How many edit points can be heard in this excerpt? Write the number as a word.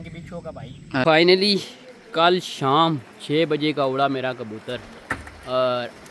one